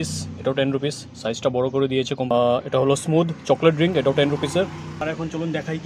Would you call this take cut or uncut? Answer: cut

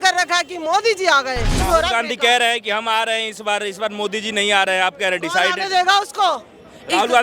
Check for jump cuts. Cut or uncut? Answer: cut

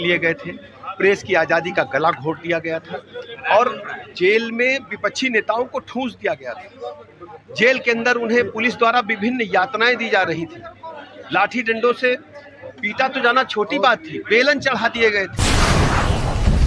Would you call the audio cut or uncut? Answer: cut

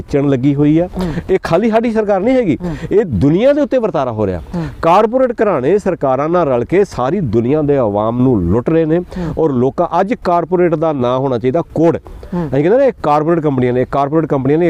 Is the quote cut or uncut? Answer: uncut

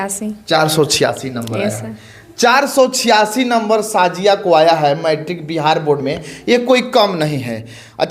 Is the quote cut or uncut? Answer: uncut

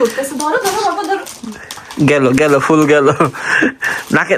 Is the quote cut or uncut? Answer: uncut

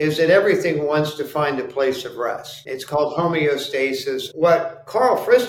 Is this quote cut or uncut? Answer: cut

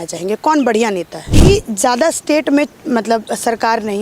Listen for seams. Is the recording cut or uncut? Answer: cut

